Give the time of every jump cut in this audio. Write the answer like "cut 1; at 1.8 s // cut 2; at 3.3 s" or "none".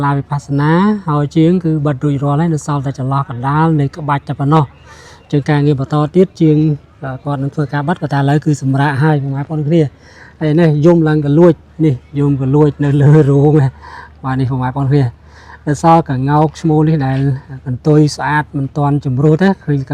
none